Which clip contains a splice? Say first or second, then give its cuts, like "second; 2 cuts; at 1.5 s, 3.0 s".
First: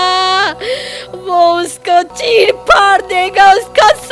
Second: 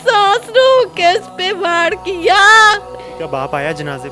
second; 1 cut; at 3.0 s